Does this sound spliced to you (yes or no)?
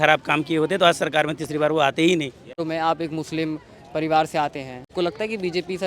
yes